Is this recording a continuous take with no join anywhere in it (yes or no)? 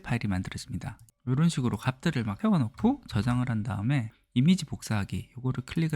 no